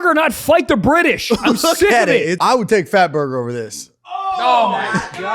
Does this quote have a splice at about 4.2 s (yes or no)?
no